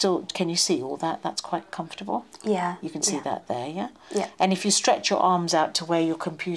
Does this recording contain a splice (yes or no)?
no